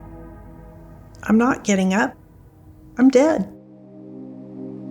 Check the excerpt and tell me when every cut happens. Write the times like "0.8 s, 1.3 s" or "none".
3.6 s